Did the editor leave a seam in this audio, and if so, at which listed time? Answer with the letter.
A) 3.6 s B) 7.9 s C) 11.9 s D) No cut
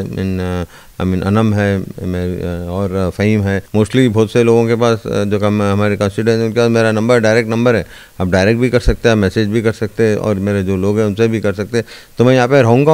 A